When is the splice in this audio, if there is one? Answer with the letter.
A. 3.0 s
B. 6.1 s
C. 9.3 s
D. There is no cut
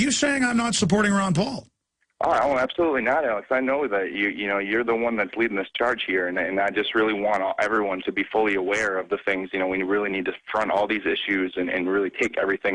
D